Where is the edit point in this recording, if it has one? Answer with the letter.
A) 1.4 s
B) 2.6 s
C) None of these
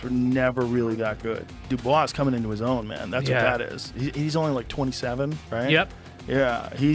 A